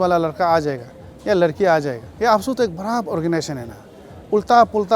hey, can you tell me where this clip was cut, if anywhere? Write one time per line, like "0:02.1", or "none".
0:02.0